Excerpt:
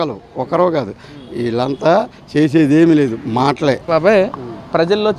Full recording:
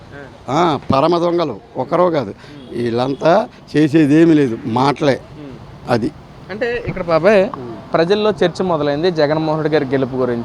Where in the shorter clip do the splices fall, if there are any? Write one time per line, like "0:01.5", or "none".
0:03.8